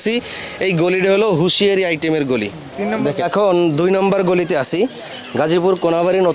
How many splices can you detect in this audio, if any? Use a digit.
1